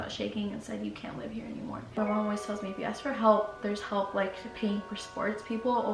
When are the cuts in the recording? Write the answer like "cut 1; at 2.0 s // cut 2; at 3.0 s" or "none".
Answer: cut 1; at 2.0 s

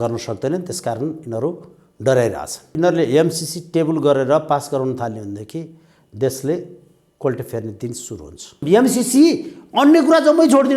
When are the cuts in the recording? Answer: cut 1; at 2.7 s // cut 2; at 8.6 s

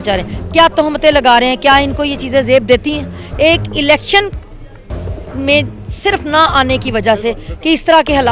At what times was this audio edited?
none

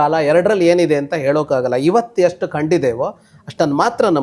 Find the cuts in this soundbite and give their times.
none

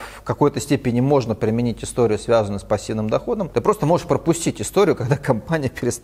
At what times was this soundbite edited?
cut 1; at 3.5 s

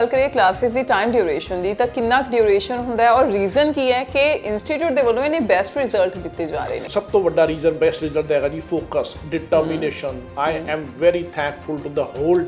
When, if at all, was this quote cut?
cut 1; at 6.8 s

